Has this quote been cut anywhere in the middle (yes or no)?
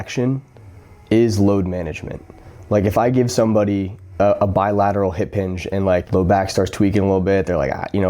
yes